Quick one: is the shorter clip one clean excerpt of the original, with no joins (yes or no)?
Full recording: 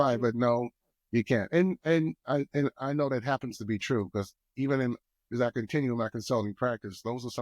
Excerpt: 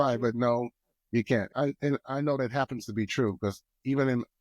no